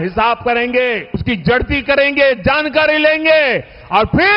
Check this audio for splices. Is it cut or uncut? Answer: cut